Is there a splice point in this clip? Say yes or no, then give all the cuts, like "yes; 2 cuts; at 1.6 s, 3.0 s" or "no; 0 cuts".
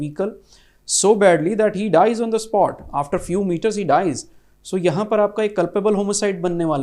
no; 0 cuts